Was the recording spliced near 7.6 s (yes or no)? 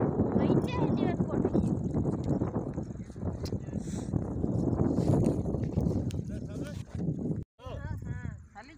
yes